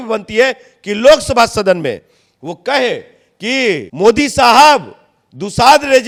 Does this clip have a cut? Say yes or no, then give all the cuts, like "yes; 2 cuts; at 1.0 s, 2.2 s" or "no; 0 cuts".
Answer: no; 0 cuts